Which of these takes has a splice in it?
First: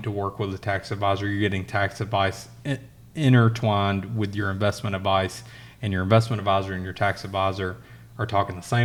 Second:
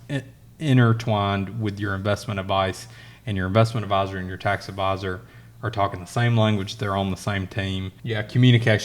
second; 1 cut; at 7.9 s

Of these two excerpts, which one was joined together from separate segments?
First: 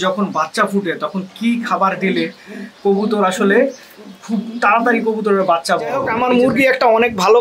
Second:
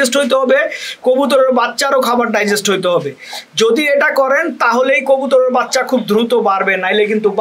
first; 1 cut; at 6.1 s

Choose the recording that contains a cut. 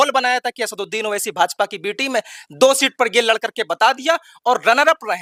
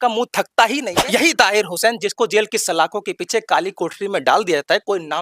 second; 1 cut; at 0.9 s

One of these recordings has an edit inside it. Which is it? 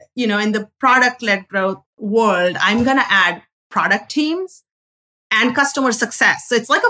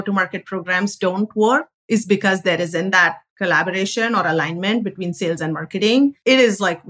first; 1 cut; at 1.9 s

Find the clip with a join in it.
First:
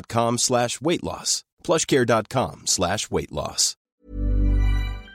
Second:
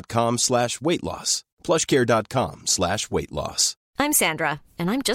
first; 1 cut; at 3.9 s

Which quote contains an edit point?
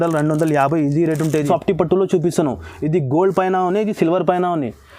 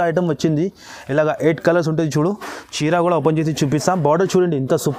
first; 1 cut; at 1.5 s

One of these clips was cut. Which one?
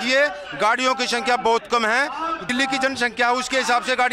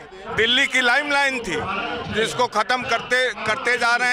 first; 1 cut; at 2.5 s

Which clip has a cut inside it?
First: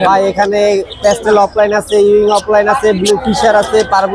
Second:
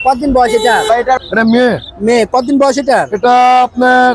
second; 1 cut; at 1.2 s

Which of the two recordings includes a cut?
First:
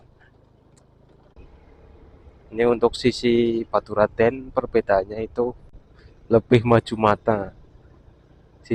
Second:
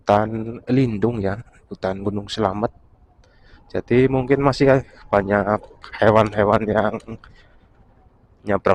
first; 1 cut; at 1.4 s

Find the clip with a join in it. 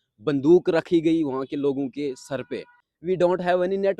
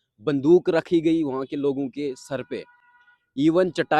first; 1 cut; at 2.9 s

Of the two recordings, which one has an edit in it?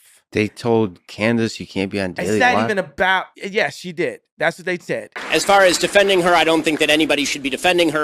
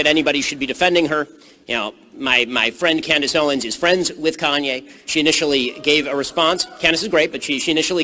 first; 1 cut; at 5.2 s

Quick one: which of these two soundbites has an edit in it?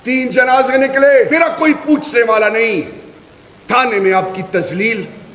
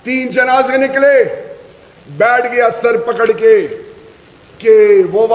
first; 1 cut; at 1.3 s

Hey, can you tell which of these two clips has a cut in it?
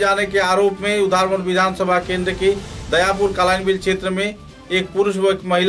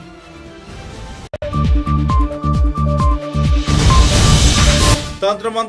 second; 2 cuts; at 1.4 s, 5.0 s

